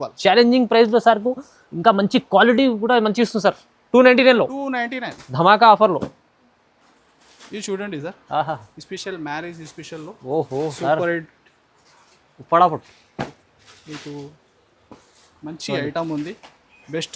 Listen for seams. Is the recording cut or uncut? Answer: uncut